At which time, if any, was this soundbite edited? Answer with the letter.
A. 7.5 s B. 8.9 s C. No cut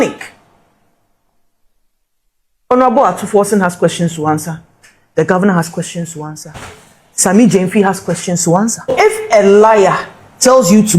B